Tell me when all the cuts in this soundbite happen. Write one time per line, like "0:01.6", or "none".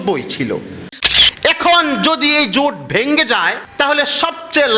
0:00.9
0:03.6